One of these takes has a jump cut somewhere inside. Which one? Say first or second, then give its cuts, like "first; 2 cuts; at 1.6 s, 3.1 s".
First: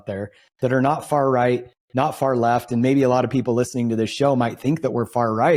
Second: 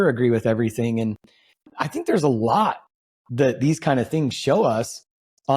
second; 1 cut; at 1.7 s